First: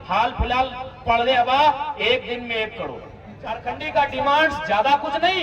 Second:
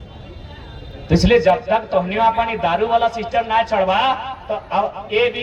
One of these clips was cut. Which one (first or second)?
first